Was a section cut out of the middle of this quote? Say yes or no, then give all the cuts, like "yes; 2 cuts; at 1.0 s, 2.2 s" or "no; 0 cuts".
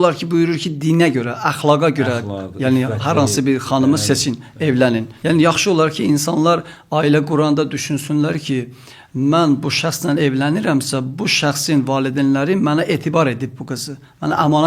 yes; 1 cut; at 5.1 s